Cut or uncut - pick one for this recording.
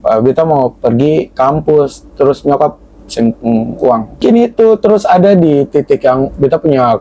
cut